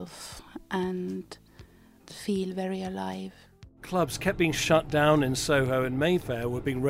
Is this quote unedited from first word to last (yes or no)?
no